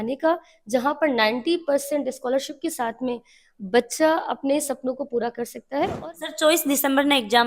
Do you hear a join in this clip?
yes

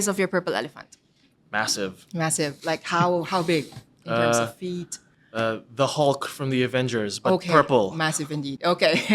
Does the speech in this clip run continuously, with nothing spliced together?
no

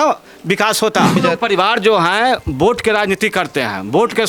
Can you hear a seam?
yes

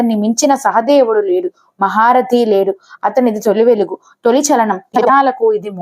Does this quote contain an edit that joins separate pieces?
yes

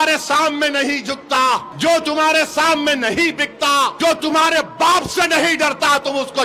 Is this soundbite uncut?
no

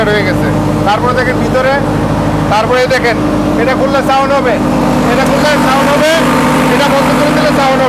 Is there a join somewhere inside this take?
no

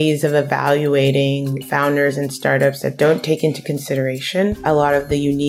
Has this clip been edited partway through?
yes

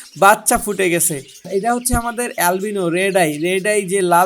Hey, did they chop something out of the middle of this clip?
yes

